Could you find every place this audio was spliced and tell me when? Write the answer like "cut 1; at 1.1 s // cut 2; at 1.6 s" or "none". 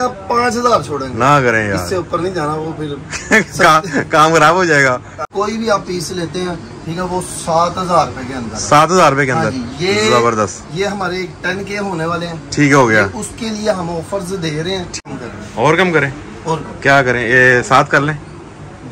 cut 1; at 5.3 s // cut 2; at 15.0 s